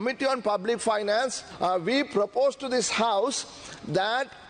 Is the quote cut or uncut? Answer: cut